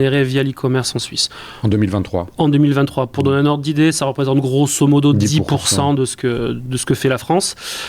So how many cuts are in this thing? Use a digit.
0